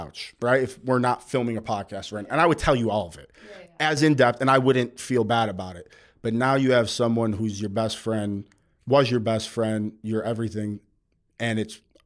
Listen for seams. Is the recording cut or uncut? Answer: uncut